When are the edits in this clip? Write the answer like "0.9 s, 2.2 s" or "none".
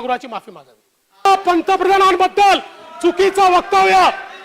1.3 s